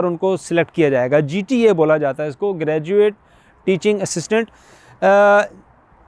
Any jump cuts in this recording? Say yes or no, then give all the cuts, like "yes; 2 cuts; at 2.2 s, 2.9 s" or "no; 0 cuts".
no; 0 cuts